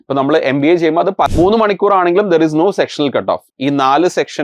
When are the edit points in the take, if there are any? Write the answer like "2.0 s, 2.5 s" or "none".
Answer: 1.3 s